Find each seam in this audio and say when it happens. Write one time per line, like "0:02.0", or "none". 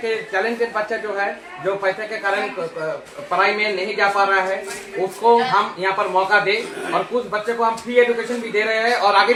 none